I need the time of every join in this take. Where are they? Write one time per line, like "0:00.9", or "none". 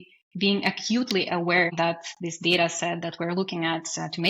0:01.7